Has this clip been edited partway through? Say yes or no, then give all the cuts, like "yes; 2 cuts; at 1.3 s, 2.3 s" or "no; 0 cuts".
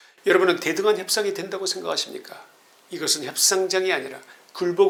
no; 0 cuts